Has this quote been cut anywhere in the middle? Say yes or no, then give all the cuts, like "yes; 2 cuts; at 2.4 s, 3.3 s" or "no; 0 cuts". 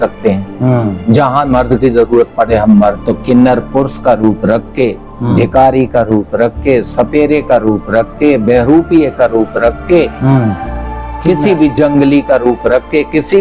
yes; 1 cut; at 3.0 s